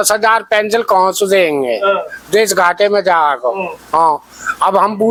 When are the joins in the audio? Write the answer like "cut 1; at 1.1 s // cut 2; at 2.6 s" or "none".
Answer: none

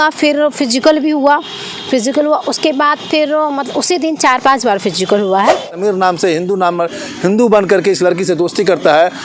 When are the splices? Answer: cut 1; at 5.7 s

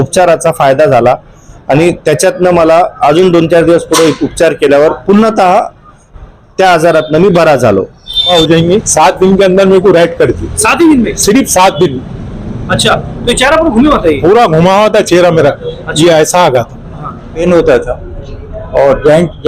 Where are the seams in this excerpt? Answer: cut 1; at 8.3 s // cut 2; at 17.4 s

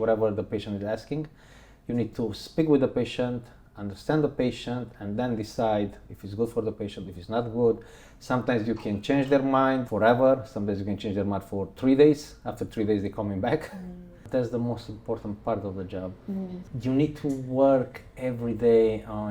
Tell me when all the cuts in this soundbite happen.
cut 1; at 9.9 s // cut 2; at 14.2 s // cut 3; at 16.6 s

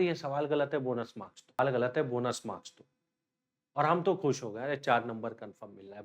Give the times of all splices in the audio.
cut 1; at 1.6 s

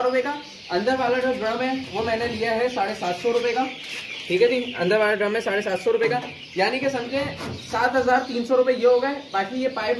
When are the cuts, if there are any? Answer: none

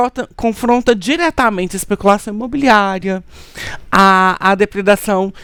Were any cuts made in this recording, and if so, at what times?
none

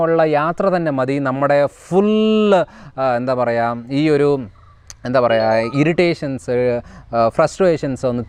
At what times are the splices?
none

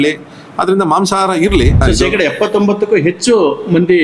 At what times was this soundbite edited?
cut 1; at 1.8 s

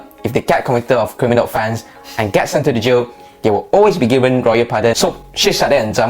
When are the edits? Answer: cut 1; at 5.0 s

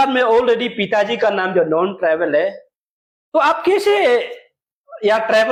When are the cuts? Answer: none

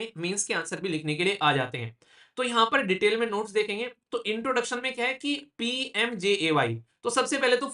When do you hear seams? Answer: none

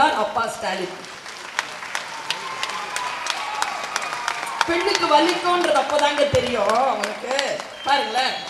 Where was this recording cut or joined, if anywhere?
none

